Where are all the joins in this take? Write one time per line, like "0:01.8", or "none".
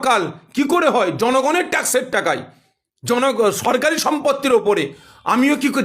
none